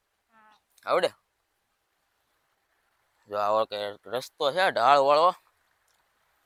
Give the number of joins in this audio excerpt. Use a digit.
0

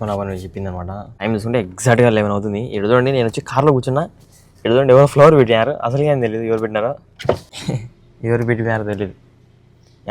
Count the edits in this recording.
2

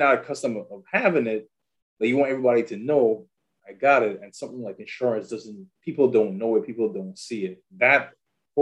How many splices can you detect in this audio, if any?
1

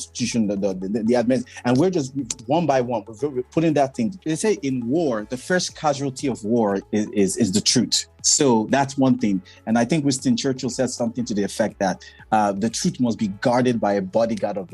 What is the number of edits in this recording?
2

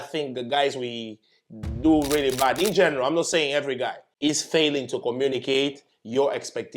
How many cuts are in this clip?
1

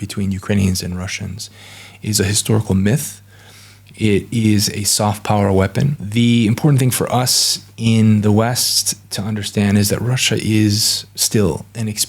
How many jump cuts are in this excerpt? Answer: 1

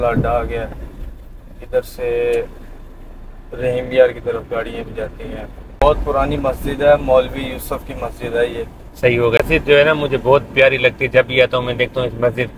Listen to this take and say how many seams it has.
2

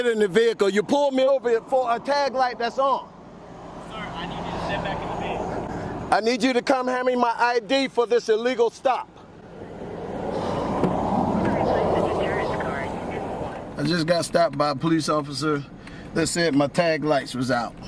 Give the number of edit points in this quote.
0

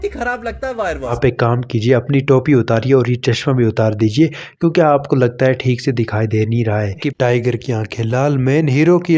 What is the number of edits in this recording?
2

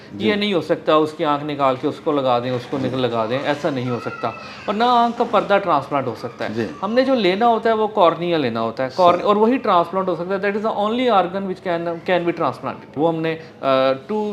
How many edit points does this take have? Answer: 1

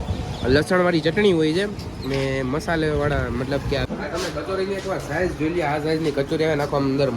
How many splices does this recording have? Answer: 1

